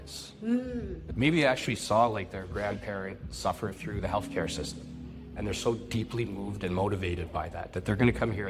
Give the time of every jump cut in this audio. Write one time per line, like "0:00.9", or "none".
none